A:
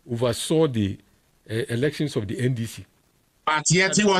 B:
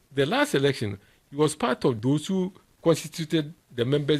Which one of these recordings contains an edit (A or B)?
B